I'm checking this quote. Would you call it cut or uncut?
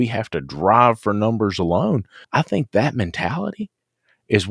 cut